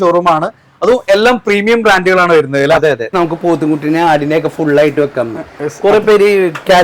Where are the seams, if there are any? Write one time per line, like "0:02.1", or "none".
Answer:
0:03.1